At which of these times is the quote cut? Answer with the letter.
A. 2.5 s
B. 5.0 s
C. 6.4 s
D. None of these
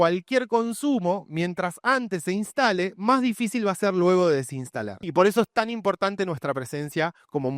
B